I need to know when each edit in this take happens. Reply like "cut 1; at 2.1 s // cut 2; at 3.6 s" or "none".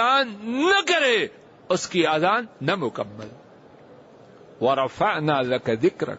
none